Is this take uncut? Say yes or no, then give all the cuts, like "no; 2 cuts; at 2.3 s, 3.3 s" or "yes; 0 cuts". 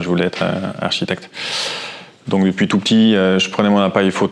yes; 0 cuts